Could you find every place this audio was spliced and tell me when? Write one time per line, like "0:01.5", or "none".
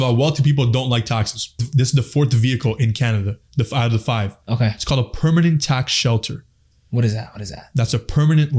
0:01.6